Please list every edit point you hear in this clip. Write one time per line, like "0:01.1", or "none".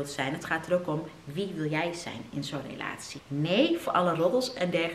0:03.2